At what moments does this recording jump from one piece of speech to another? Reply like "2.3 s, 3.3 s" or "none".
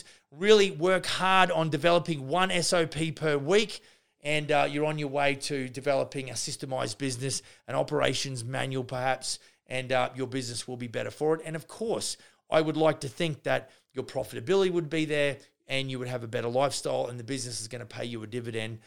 none